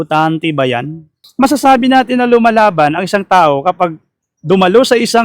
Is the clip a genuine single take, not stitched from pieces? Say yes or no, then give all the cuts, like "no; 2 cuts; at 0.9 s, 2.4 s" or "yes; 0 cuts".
no; 1 cut; at 1.2 s